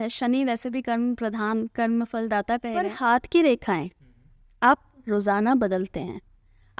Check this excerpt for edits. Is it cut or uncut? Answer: cut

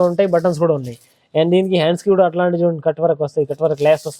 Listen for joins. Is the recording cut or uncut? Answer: uncut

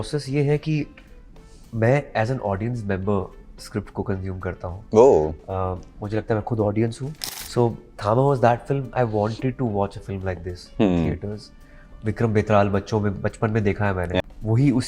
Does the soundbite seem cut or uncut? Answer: cut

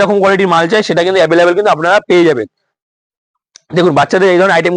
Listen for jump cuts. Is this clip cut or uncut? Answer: uncut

